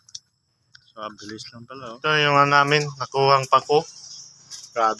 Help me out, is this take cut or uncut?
cut